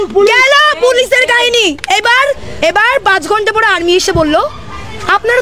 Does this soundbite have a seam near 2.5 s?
yes; 1 cut; at 2.5 s

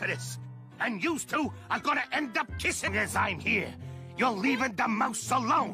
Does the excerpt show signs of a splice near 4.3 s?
no; 1 cut; at 2.8 s

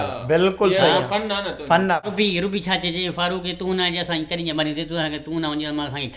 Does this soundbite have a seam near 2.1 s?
yes; 1 cut; at 2.1 s

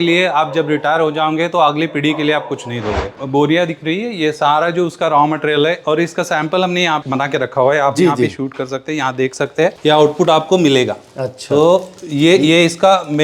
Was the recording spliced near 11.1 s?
no; 2 cuts; at 3.1 s, 9.7 s

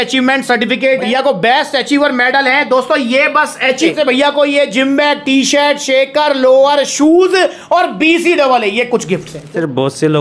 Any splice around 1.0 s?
yes; 3 cuts; at 1.0 s, 3.9 s, 9.4 s

